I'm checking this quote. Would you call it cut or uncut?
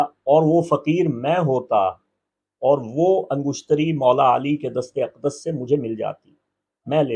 uncut